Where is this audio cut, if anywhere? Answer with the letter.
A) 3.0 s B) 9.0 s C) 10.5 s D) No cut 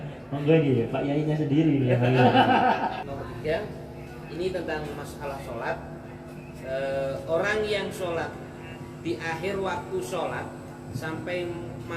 A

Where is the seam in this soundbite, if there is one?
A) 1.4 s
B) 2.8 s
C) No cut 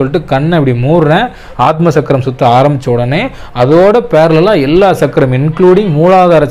A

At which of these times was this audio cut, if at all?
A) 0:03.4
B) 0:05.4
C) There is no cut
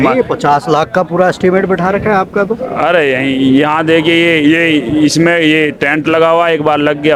C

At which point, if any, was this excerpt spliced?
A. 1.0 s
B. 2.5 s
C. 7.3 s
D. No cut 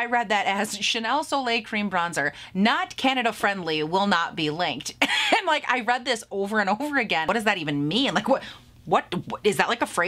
C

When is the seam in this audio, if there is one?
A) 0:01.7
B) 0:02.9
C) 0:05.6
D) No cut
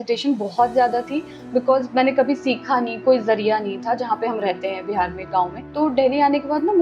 C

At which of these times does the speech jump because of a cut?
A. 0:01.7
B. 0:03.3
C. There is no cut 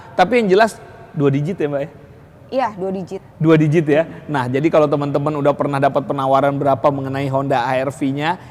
C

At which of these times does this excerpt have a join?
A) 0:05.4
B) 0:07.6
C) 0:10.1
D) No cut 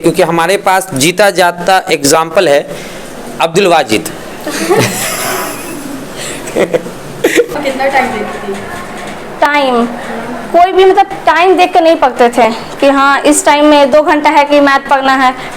B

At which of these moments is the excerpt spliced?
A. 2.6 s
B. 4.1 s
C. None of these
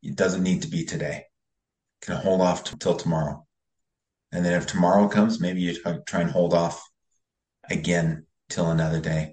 A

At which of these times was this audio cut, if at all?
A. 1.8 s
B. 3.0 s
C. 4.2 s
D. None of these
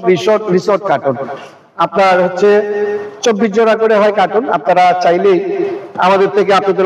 D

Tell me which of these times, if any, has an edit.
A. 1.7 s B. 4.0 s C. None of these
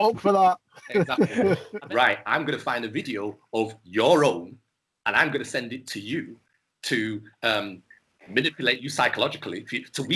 A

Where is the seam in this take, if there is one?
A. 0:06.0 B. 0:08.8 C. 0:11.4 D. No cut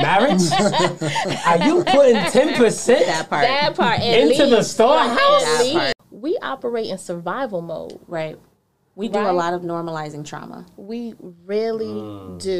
A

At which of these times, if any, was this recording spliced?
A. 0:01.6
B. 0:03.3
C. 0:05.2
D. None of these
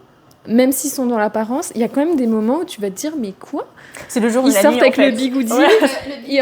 D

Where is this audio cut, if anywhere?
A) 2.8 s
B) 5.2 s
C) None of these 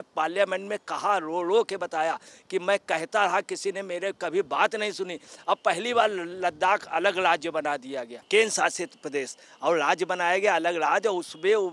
C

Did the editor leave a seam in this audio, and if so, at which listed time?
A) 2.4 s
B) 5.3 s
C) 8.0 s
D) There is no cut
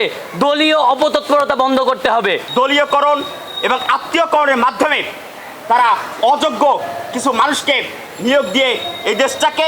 A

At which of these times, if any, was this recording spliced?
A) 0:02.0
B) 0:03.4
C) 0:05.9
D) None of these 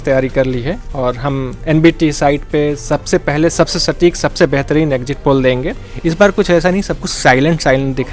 C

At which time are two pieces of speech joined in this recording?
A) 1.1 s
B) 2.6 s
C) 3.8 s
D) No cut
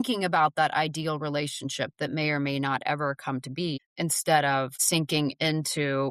D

